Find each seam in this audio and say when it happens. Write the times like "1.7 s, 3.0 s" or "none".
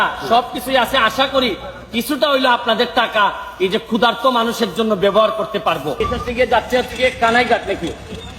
6.1 s